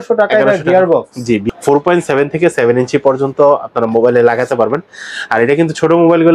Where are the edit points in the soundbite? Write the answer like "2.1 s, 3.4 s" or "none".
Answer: 1.4 s